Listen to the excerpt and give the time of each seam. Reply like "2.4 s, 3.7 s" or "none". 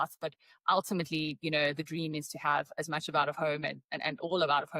none